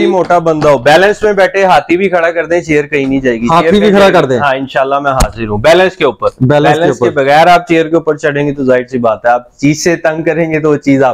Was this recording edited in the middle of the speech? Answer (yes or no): no